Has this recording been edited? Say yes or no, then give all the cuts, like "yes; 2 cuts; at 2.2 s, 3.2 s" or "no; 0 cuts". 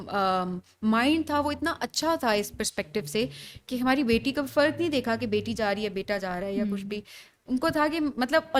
no; 0 cuts